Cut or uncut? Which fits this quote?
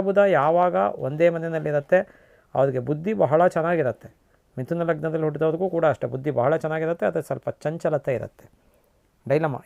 uncut